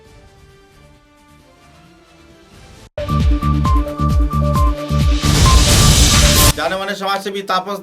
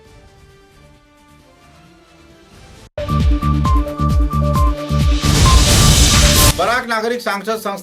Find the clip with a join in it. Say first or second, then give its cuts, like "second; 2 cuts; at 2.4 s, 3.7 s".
first; 1 cut; at 6.5 s